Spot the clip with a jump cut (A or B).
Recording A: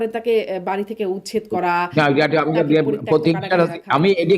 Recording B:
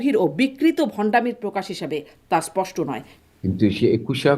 B